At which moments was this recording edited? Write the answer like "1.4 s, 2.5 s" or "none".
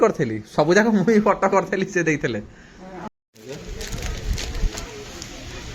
none